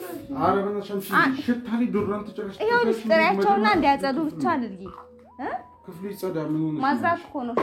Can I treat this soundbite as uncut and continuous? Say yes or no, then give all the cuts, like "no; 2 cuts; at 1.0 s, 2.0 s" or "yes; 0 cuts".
yes; 0 cuts